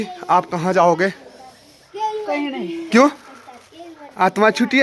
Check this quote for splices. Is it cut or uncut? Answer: uncut